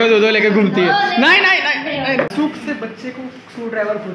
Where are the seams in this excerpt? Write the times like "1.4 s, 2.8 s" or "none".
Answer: 2.2 s